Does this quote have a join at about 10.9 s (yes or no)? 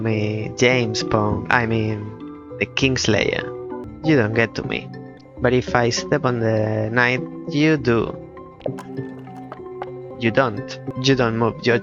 yes